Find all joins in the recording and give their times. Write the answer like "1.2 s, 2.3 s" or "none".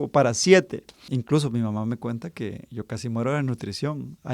0.9 s

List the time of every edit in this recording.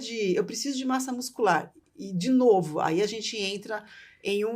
none

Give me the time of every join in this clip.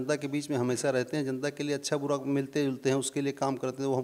none

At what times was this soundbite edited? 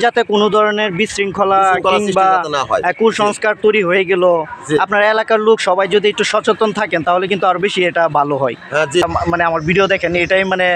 9.0 s

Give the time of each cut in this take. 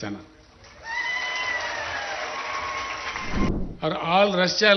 3.5 s

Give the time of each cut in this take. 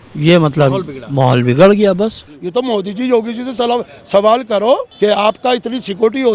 2.3 s, 4.9 s

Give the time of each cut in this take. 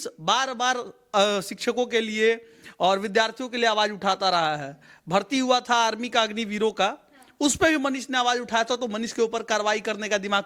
none

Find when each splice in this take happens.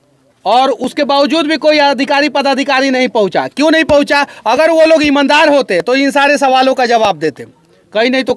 none

